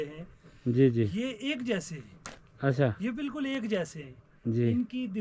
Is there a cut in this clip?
no; 0 cuts

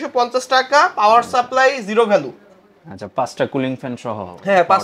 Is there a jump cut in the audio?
no; 0 cuts

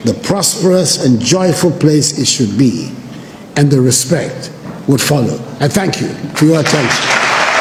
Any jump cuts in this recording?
no; 0 cuts

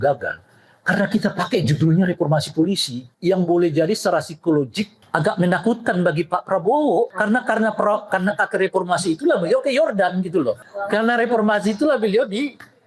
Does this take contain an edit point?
yes; 4 cuts; at 3.1 s, 5.0 s, 7.1 s, 10.6 s

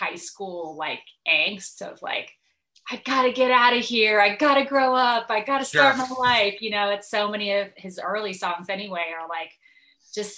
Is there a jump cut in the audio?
no; 0 cuts

